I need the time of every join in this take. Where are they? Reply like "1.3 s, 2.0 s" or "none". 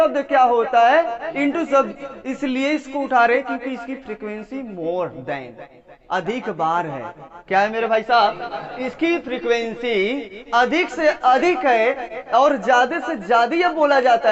none